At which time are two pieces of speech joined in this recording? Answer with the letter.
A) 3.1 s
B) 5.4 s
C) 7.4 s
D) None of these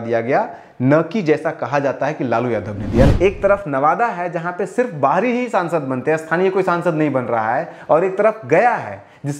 A